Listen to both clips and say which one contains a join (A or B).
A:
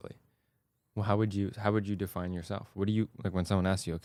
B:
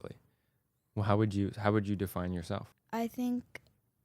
B